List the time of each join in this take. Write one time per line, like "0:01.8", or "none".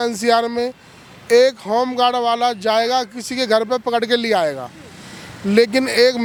none